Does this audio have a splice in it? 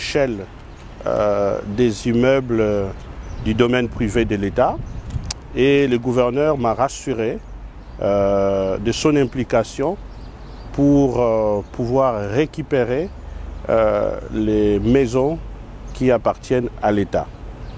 no; 0 cuts

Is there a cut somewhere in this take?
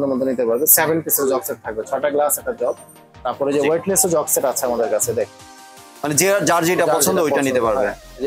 no; 0 cuts

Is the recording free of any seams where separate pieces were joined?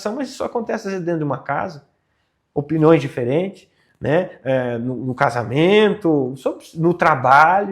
yes; 0 cuts

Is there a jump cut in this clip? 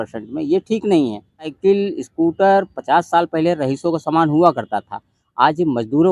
yes; 1 cut; at 1.6 s

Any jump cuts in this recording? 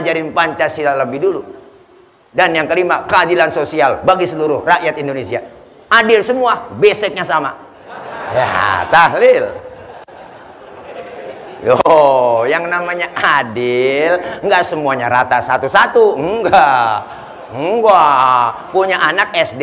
yes; 1 cut; at 2.2 s

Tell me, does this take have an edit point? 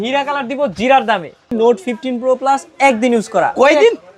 yes; 1 cut; at 1.5 s

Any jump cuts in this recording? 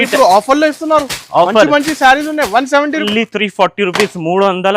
yes; 1 cut; at 3.0 s

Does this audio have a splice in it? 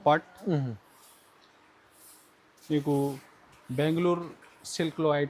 no; 0 cuts

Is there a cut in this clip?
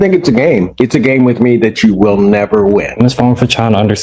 yes; 1 cut; at 2.9 s

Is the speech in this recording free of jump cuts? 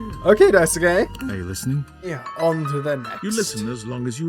no; 1 cut; at 2.2 s

